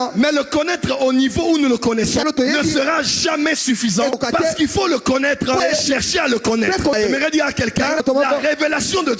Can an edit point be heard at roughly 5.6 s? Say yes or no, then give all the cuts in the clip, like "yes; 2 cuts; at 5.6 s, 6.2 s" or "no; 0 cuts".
yes; 5 cuts; at 2.2 s, 4.1 s, 5.6 s, 6.9 s, 8.0 s